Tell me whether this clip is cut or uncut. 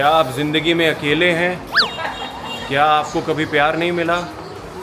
uncut